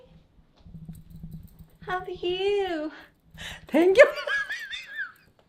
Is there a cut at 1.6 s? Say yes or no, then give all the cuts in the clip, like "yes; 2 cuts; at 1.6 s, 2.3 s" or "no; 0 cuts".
no; 0 cuts